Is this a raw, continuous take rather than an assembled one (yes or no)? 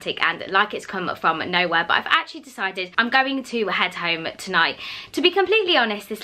yes